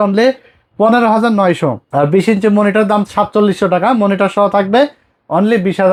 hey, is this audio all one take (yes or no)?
yes